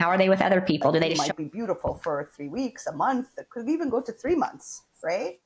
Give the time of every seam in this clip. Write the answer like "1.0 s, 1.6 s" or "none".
1.2 s